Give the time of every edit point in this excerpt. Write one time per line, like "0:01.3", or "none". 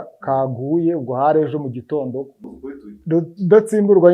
0:02.5